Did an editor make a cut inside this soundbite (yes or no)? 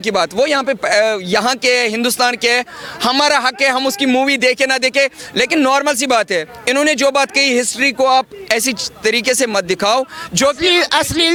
no